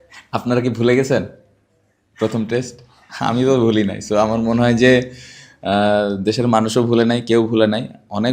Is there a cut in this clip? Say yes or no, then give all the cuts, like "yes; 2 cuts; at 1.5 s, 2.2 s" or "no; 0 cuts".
no; 0 cuts